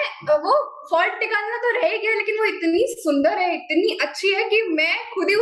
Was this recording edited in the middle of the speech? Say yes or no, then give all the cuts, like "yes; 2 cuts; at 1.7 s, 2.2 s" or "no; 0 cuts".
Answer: no; 0 cuts